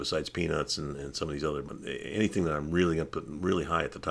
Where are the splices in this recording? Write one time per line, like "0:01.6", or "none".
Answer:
none